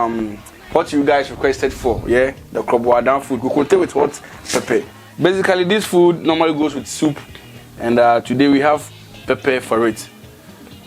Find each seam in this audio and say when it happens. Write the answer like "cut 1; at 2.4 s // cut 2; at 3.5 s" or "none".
cut 1; at 5.0 s